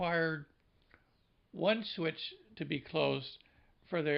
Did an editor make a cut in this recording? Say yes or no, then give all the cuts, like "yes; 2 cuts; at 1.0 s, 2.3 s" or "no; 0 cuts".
no; 0 cuts